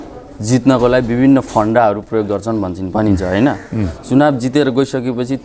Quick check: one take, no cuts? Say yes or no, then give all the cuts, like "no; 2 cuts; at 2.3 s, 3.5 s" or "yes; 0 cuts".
yes; 0 cuts